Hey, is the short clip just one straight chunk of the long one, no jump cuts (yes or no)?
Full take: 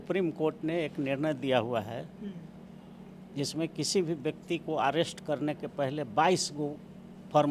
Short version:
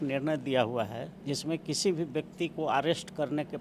no